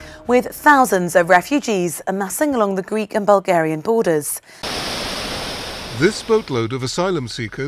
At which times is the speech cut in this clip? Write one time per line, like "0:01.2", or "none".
0:04.8